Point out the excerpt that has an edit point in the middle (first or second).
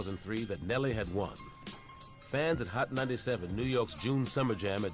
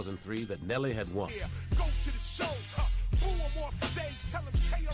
first